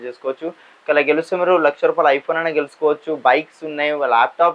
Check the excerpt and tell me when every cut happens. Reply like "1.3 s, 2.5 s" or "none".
none